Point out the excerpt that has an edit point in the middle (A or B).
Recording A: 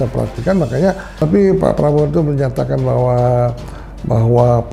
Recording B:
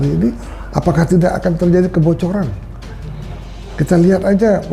A